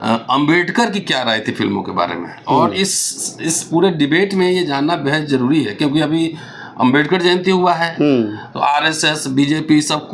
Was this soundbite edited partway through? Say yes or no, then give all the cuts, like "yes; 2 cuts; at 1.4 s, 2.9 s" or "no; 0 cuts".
no; 0 cuts